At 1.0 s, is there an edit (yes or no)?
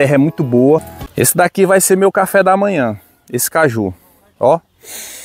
yes